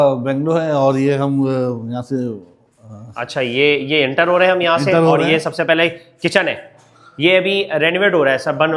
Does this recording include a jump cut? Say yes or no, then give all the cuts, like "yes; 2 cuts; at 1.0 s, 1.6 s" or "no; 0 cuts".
no; 0 cuts